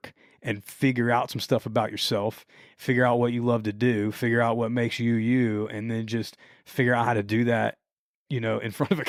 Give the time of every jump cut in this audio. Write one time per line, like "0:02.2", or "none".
none